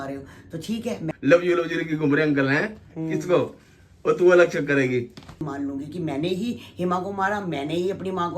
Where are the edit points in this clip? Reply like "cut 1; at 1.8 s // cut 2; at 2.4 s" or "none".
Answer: cut 1; at 1.1 s // cut 2; at 5.4 s

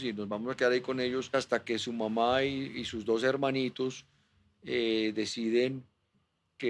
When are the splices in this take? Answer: cut 1; at 1.3 s

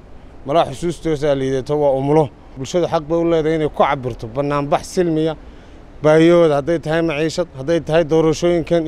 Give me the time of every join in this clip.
cut 1; at 2.6 s

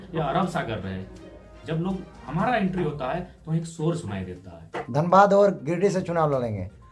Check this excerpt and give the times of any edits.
cut 1; at 4.7 s

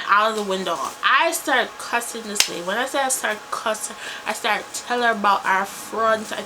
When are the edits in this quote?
cut 1; at 4.1 s

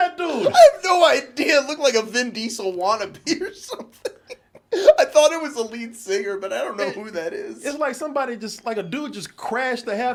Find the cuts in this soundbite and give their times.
none

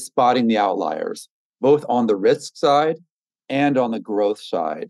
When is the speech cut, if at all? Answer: none

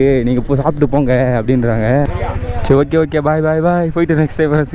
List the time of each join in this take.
cut 1; at 2.1 s

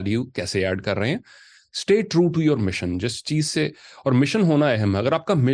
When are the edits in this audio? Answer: none

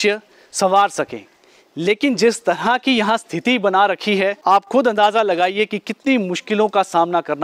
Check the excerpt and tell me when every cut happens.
cut 1; at 4.4 s

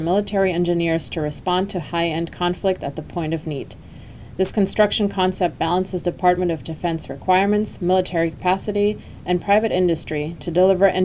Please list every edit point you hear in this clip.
cut 1; at 3.8 s

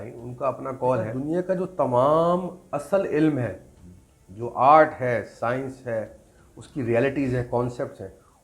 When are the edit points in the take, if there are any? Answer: cut 1; at 1.1 s

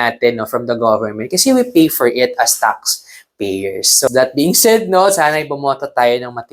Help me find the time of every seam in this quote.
cut 1; at 4.1 s

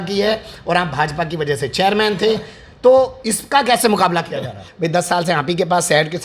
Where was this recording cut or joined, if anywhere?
cut 1; at 4.6 s

